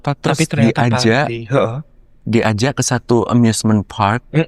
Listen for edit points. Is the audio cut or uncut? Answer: uncut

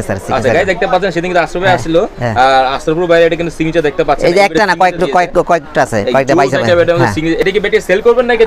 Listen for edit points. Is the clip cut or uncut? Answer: uncut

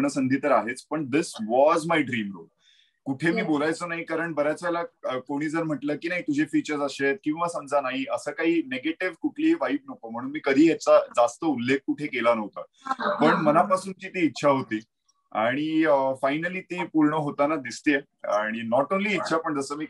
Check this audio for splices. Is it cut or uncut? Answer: uncut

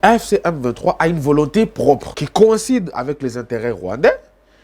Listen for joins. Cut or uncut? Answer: cut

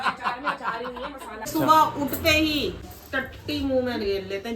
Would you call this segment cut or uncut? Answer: cut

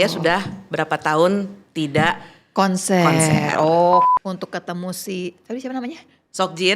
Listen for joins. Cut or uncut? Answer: cut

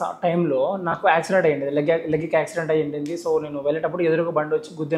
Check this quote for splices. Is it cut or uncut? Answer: uncut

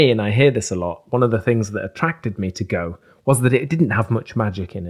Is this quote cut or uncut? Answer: uncut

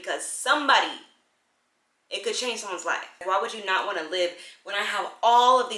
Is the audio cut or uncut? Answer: cut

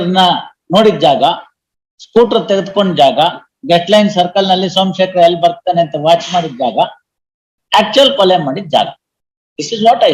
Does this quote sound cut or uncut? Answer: uncut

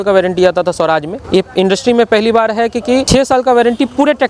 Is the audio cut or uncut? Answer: cut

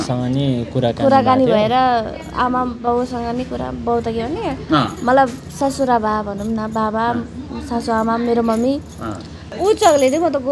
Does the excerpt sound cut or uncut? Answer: cut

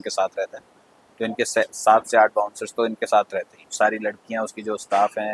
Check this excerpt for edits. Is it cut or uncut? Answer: cut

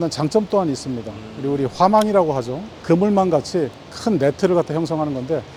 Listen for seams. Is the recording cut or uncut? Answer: uncut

